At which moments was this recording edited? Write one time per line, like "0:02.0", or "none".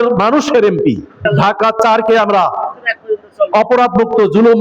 0:01.1